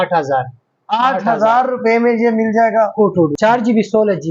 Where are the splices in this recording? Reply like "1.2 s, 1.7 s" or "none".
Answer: 3.3 s